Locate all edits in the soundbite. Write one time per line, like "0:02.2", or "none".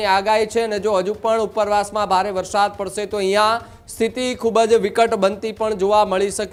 none